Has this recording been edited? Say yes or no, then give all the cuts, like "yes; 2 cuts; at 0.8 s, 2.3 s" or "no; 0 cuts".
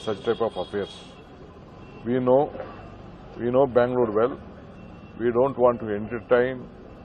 no; 0 cuts